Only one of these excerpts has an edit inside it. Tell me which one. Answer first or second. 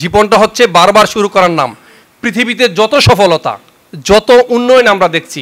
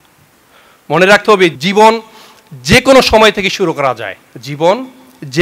second